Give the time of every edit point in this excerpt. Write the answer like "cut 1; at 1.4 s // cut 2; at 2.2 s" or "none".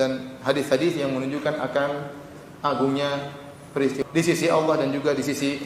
cut 1; at 4.0 s